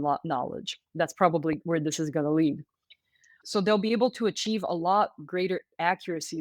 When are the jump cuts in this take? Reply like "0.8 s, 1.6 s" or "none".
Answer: 1.6 s, 3.3 s